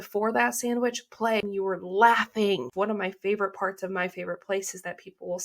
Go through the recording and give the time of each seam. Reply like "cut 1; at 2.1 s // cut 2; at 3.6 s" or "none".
cut 1; at 1.4 s // cut 2; at 2.7 s